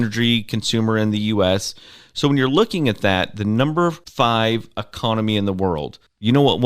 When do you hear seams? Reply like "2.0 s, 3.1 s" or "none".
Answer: 4.0 s